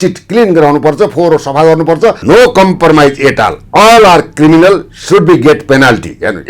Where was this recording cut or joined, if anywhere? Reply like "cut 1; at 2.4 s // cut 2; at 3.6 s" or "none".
cut 1; at 2.2 s